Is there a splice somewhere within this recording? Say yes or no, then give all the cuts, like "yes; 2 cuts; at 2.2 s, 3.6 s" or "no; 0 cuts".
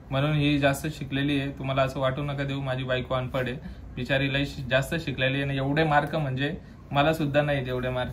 no; 0 cuts